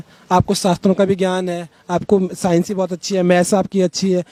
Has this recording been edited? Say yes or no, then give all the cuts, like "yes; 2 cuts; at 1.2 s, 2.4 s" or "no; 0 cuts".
no; 0 cuts